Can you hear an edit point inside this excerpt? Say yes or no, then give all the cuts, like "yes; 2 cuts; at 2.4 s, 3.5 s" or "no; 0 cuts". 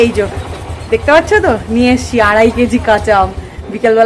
no; 0 cuts